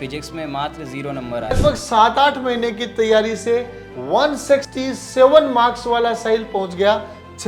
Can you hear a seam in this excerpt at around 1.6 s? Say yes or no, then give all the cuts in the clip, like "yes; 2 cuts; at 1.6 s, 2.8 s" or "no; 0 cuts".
yes; 1 cut; at 1.6 s